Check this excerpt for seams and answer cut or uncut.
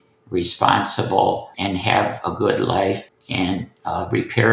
cut